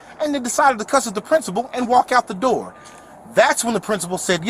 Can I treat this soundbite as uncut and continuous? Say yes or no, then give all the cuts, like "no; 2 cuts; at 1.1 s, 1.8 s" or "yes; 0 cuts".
yes; 0 cuts